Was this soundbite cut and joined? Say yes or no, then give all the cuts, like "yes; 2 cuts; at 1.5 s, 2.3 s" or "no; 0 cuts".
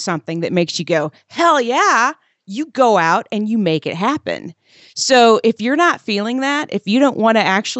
no; 0 cuts